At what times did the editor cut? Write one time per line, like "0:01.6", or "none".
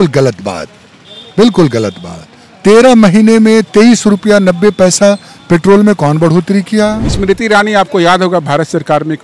0:07.1